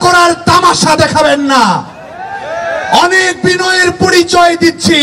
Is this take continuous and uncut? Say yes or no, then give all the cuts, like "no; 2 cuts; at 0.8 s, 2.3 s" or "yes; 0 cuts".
yes; 0 cuts